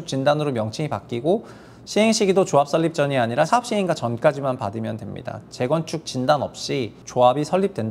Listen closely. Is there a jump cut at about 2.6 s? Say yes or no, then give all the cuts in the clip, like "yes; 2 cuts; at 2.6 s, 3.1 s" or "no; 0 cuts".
no; 1 cut; at 7.0 s